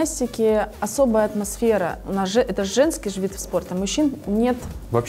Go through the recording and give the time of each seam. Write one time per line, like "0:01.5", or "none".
none